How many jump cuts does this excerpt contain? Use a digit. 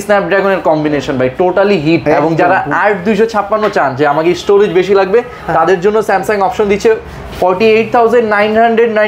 0